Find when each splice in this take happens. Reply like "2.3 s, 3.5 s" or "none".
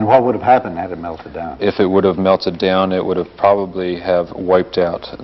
2.5 s